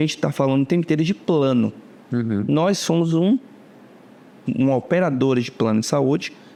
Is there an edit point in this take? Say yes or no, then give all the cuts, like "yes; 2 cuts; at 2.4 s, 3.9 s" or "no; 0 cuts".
no; 0 cuts